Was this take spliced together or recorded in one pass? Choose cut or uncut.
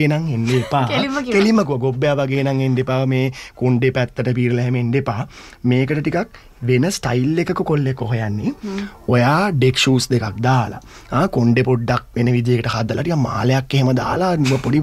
uncut